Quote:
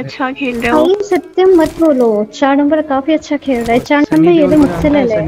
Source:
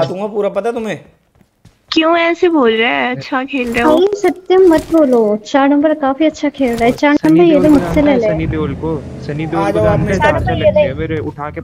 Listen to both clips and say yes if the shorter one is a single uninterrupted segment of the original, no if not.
yes